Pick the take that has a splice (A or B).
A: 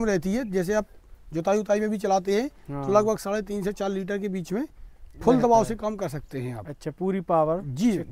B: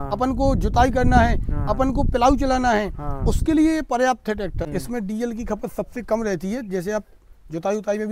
B